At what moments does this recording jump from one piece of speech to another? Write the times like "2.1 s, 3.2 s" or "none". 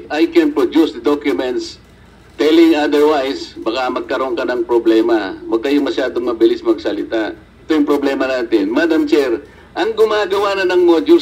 7.6 s